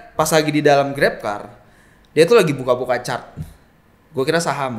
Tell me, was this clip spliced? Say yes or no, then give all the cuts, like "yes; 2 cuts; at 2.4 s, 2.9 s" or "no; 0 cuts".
no; 0 cuts